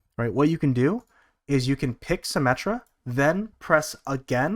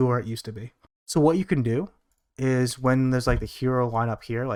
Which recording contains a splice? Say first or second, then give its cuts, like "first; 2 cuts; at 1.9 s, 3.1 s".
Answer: first; 1 cut; at 3.0 s